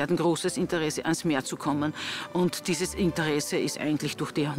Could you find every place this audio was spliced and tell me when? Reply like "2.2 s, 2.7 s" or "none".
none